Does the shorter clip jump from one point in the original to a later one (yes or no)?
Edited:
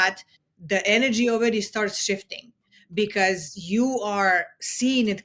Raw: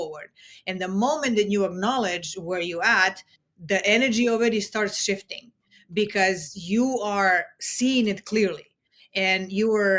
no